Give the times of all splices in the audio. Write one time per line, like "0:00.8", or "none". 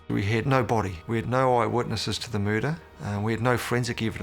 0:01.0
0:02.9